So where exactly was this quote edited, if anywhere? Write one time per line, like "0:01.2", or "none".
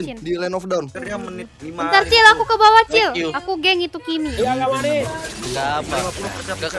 0:01.0